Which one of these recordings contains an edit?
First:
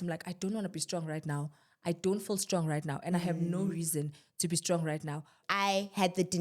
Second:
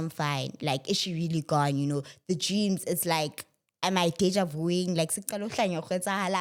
first; 1 cut; at 5.4 s

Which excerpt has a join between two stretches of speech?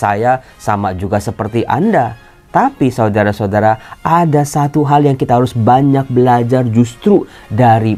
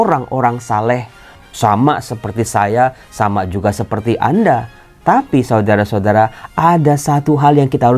second; 1 cut; at 1.3 s

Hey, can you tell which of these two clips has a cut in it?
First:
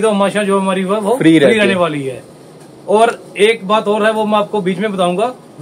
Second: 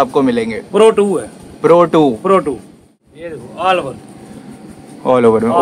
second; 1 cut; at 2.4 s

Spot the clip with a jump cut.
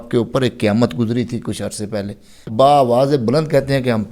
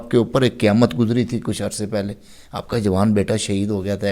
first; 1 cut; at 2.5 s

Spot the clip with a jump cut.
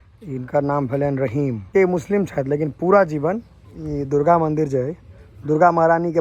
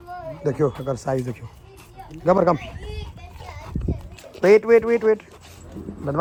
first; 1 cut; at 1.7 s

